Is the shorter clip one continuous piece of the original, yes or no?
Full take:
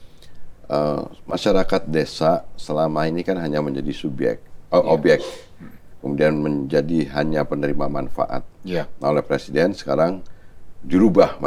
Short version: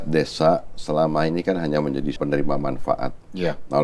no